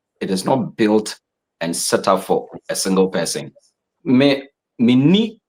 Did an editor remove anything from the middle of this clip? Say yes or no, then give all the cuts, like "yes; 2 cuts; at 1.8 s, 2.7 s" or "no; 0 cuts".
yes; 1 cut; at 3.9 s